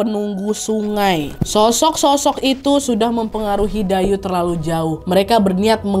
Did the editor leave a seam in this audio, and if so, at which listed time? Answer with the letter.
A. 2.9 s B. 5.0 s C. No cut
B